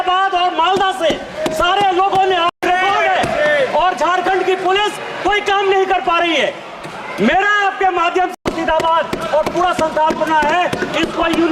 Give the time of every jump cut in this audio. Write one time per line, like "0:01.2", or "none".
0:02.6
0:08.4

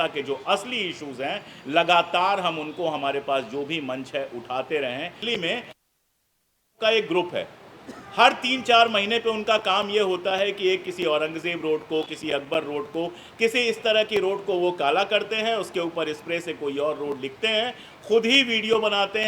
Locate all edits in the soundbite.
0:05.2

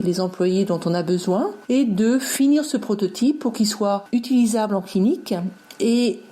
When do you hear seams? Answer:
0:01.6
0:04.0

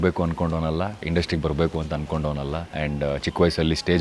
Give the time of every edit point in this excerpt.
0:01.0
0:02.7

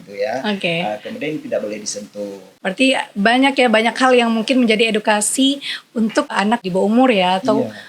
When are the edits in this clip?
0:02.4
0:06.6

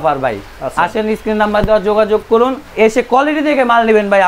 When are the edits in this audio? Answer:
none

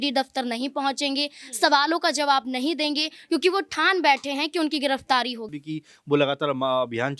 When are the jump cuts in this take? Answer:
0:05.5

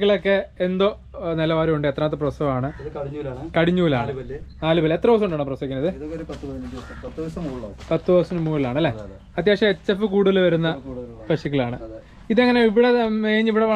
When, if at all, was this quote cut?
none

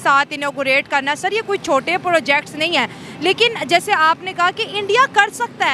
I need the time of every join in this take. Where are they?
none

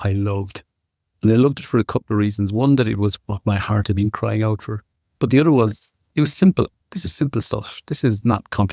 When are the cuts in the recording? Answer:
none

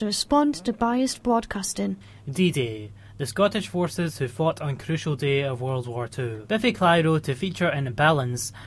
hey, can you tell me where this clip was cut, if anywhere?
0:02.1
0:06.4

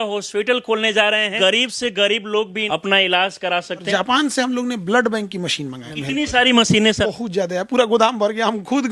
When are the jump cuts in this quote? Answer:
0:01.3
0:02.6
0:03.9
0:05.9
0:07.0

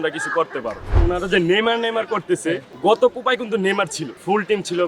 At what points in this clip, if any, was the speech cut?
0:02.7

